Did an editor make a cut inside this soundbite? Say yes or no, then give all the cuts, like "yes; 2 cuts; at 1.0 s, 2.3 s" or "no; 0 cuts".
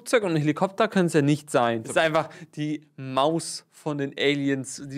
yes; 1 cut; at 1.9 s